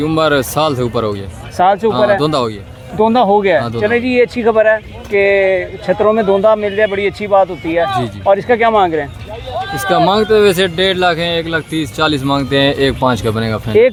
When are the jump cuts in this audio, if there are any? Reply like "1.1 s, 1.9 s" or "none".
none